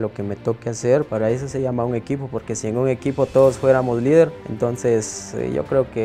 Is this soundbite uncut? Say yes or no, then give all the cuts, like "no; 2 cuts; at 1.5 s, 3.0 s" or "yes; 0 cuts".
no; 2 cuts; at 1.1 s, 4.4 s